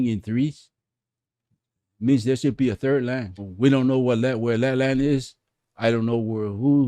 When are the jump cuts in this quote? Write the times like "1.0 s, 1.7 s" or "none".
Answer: 3.4 s